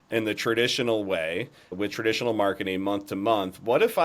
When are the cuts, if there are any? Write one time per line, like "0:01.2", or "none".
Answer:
0:01.7

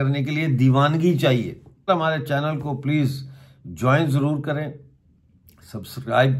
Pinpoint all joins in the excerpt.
0:01.9

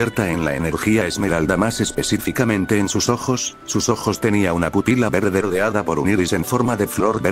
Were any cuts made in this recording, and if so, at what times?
none

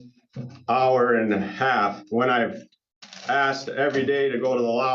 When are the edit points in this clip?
none

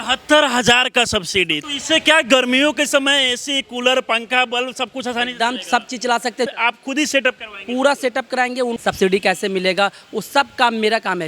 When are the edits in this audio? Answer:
0:01.6
0:06.5
0:08.8

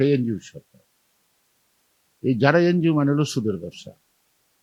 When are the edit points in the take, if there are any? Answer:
none

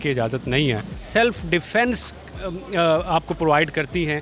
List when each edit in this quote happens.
0:00.9

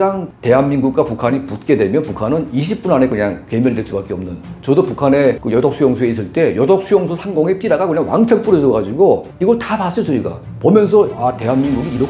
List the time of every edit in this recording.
0:04.5

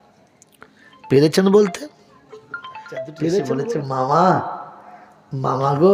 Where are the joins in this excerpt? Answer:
0:03.6

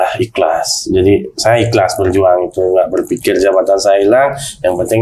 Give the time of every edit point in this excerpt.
none

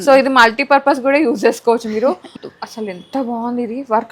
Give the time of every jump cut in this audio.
0:02.3

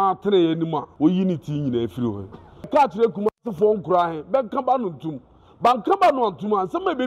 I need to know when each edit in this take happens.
0:00.9
0:02.7

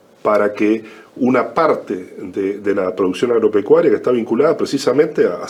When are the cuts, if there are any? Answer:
none

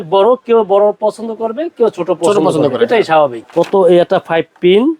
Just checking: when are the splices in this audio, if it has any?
0:03.4

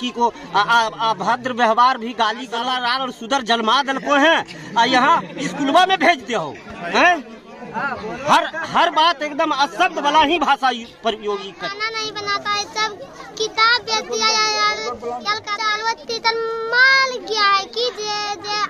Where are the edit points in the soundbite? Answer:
0:02.6
0:11.6
0:15.5

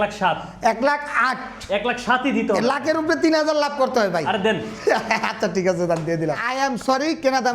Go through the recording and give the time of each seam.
0:06.5

